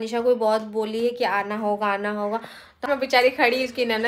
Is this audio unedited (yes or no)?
no